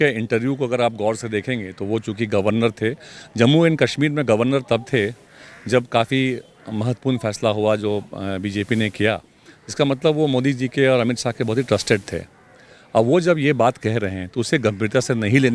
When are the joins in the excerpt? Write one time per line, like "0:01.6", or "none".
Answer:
none

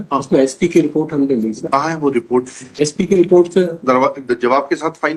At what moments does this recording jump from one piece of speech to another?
none

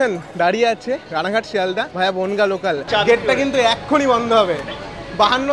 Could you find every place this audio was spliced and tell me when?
0:01.9
0:02.8

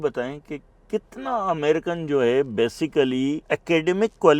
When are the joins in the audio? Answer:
0:03.4

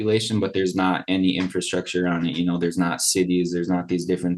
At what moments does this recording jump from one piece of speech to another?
none

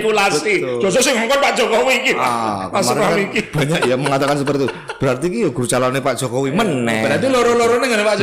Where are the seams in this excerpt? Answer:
none

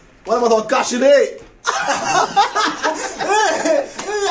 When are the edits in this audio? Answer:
none

